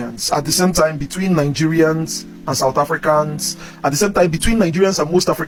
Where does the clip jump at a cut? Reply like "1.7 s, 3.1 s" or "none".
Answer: none